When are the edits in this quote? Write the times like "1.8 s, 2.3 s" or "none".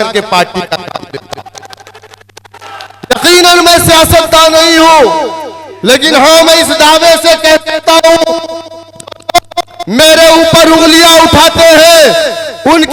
none